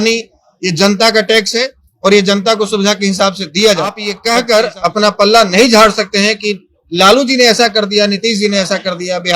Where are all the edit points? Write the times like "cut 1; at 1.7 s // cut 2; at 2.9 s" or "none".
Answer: cut 1; at 4.1 s

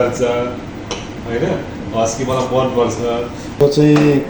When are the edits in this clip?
none

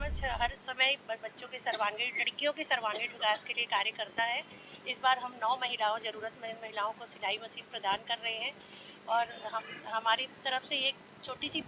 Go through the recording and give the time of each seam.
none

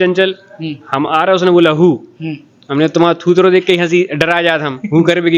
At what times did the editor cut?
none

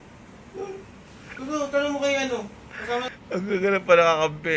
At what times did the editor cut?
none

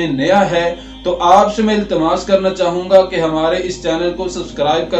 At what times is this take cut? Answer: none

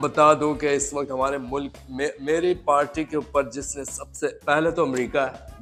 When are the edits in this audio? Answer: none

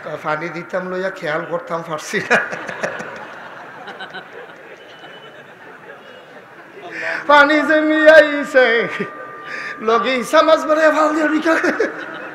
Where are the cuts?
none

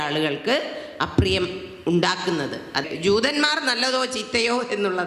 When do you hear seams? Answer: cut 1; at 2.8 s

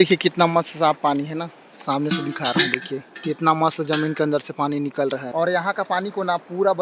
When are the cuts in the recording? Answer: cut 1; at 5.3 s

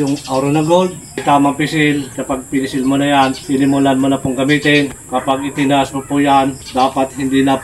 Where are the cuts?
cut 1; at 1.2 s // cut 2; at 2.1 s // cut 3; at 3.4 s // cut 4; at 5.0 s // cut 5; at 6.6 s

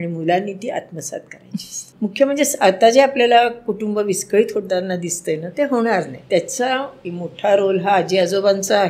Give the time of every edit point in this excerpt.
cut 1; at 1.8 s // cut 2; at 6.2 s // cut 3; at 7.0 s

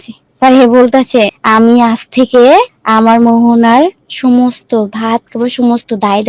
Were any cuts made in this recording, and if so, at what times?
cut 1; at 1.4 s // cut 2; at 2.8 s // cut 3; at 4.1 s

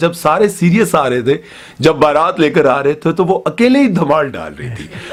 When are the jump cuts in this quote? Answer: none

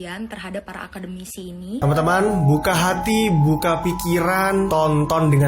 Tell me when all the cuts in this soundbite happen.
cut 1; at 1.8 s

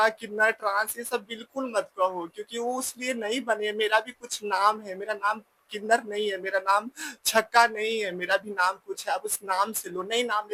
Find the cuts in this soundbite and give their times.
none

